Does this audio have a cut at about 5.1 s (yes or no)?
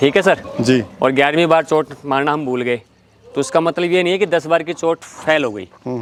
no